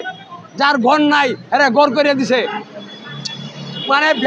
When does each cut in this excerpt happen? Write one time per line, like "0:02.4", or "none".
none